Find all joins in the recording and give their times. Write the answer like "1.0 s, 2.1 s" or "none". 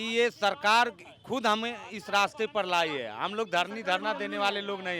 none